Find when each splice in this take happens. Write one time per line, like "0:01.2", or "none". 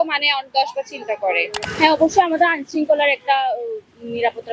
0:01.6